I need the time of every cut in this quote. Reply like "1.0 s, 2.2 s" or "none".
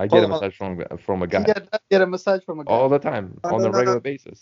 none